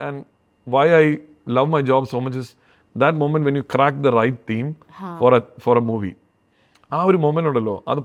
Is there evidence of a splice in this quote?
no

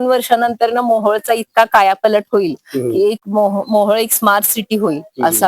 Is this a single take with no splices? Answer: yes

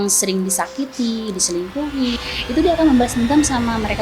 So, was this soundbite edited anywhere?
yes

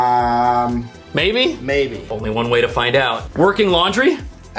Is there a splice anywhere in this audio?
no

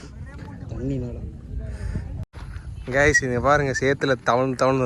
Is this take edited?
yes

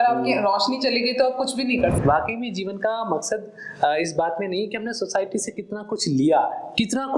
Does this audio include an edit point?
yes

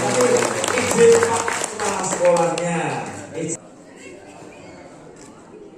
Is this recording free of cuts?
no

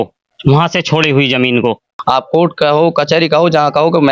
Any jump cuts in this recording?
yes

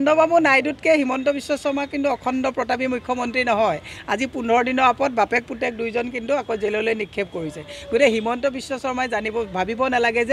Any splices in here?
no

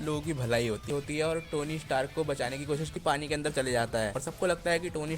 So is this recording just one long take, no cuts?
no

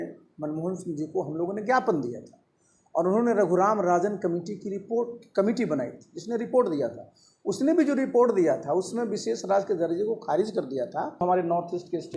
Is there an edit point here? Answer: yes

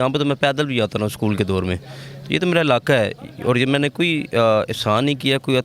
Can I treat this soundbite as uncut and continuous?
yes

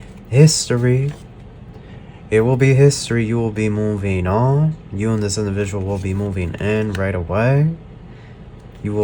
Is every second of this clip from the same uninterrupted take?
yes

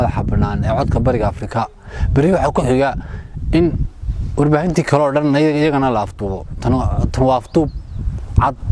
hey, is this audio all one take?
yes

